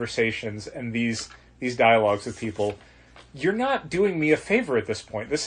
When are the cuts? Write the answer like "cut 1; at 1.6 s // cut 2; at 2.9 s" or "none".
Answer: none